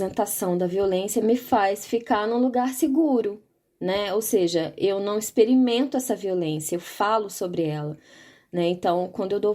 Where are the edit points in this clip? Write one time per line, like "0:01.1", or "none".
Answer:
0:01.2